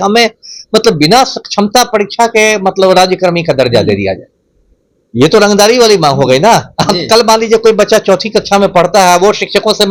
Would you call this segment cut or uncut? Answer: uncut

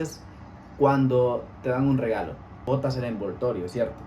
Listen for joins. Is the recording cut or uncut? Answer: cut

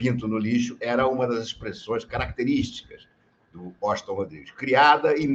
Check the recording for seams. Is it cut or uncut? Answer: uncut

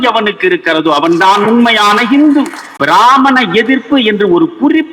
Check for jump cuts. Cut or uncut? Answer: cut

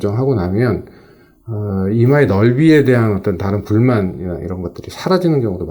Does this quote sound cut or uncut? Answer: uncut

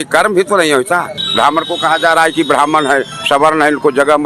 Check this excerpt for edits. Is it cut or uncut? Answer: cut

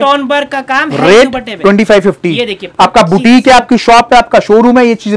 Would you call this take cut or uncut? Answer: uncut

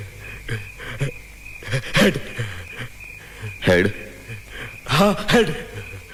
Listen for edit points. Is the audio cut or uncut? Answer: uncut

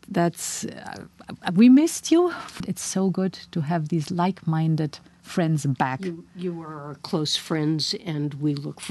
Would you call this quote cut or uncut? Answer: cut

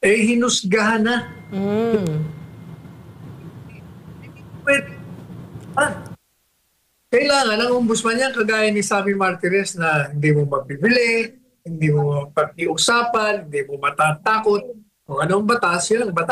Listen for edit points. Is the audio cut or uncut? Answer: uncut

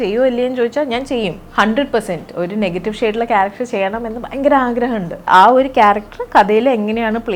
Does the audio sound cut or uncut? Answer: cut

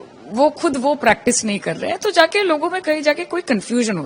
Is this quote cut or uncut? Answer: uncut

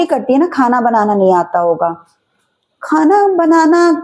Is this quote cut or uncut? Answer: uncut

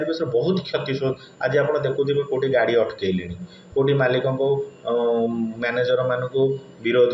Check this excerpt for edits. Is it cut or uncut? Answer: uncut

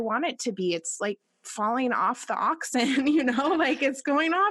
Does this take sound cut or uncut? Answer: uncut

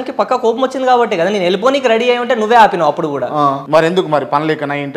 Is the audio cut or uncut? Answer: cut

